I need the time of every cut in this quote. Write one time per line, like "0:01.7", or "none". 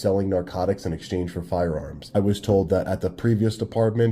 0:02.1

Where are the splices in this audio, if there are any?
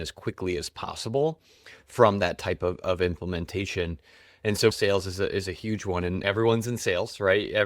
0:04.7
0:06.2

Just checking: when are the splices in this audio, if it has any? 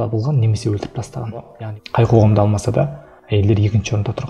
0:01.5

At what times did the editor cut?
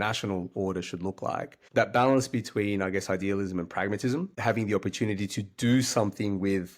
0:01.6

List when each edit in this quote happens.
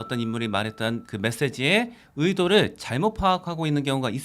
0:01.1

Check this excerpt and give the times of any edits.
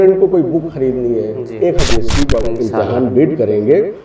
0:01.9

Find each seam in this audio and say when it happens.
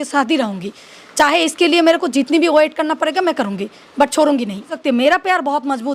0:04.7

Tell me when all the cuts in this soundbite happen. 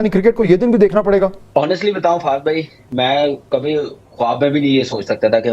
0:01.4

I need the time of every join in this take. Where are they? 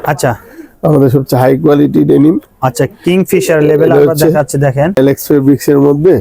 0:05.0

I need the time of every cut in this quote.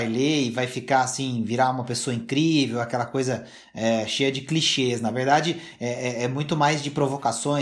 none

